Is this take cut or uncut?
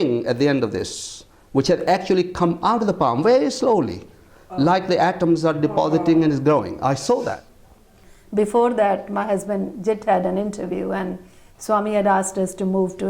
cut